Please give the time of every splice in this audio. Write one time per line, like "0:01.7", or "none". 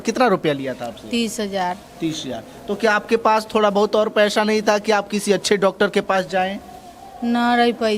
none